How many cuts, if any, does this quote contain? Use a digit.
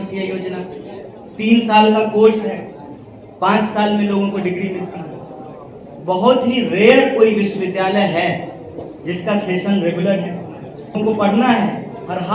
1